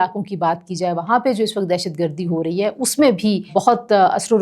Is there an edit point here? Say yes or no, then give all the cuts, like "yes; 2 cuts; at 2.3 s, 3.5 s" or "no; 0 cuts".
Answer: yes; 1 cut; at 3.5 s